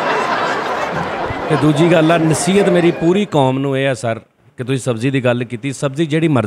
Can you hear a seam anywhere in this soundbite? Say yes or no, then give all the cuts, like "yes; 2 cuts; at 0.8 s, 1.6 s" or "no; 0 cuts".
no; 0 cuts